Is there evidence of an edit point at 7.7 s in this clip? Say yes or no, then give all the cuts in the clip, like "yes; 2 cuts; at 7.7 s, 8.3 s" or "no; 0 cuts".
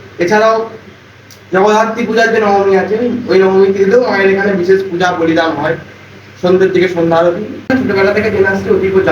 yes; 1 cut; at 7.7 s